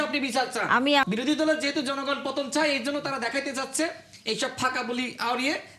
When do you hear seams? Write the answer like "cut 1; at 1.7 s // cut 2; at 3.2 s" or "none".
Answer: cut 1; at 1.0 s